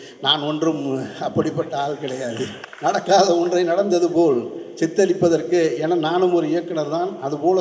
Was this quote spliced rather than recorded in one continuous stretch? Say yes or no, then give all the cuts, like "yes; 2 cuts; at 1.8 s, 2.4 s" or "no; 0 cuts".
yes; 1 cut; at 2.6 s